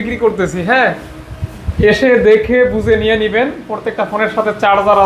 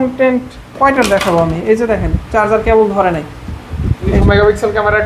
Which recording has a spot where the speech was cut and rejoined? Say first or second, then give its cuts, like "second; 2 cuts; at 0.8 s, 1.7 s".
second; 1 cut; at 4.1 s